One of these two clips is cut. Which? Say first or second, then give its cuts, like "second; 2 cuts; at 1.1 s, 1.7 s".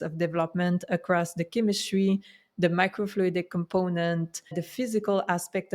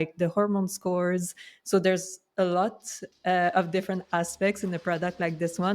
first; 1 cut; at 4.6 s